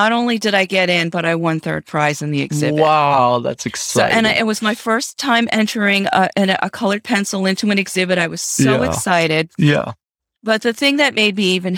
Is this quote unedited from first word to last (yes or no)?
yes